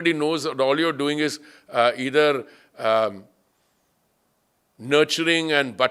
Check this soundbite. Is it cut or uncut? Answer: uncut